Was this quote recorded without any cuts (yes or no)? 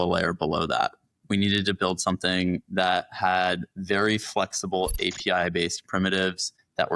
yes